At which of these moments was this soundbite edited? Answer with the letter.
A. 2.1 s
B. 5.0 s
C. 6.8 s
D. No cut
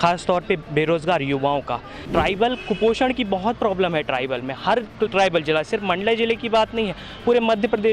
A